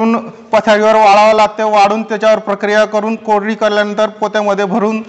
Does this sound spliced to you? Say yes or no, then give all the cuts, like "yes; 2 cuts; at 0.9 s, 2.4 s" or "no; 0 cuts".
no; 0 cuts